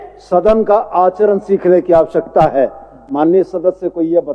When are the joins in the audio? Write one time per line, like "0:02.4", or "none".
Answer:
none